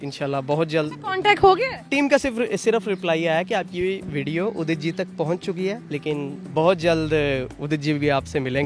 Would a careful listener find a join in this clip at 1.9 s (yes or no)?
yes